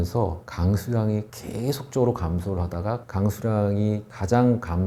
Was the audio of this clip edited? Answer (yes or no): no